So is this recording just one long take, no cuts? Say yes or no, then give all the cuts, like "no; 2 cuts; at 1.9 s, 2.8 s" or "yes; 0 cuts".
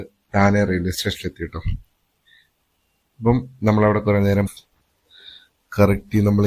no; 1 cut; at 4.5 s